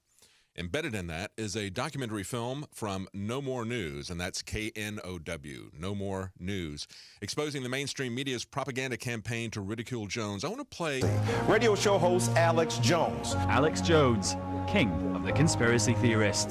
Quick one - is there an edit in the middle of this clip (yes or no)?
no